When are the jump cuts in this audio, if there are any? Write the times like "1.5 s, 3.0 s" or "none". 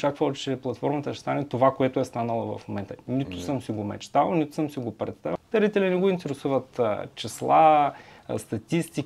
5.3 s